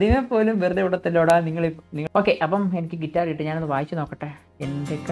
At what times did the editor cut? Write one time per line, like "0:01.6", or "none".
0:01.9